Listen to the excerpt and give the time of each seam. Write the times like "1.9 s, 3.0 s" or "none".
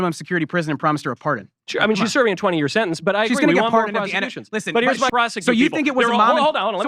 5.1 s